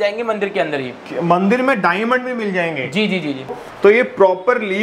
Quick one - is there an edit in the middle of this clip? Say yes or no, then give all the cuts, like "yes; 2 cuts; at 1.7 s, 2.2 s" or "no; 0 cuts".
yes; 1 cut; at 3.5 s